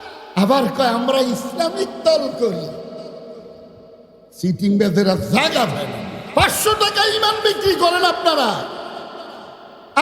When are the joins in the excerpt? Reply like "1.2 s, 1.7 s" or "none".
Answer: 6.1 s